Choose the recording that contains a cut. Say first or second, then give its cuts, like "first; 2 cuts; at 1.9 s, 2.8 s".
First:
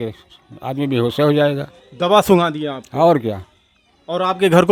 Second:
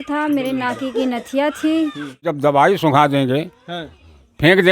second; 1 cut; at 2.3 s